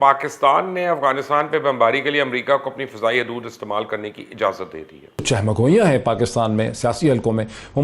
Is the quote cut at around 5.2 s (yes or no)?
yes